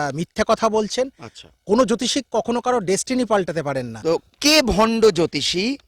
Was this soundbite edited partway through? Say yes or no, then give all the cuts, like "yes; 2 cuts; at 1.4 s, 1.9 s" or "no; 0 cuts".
yes; 1 cut; at 3.9 s